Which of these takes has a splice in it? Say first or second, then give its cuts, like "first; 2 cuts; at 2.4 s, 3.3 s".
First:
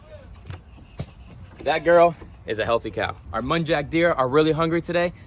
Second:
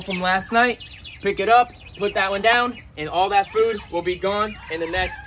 first; 1 cut; at 3.3 s